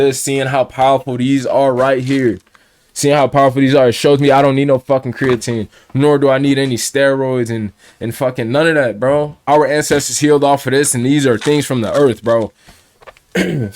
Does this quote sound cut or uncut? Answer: cut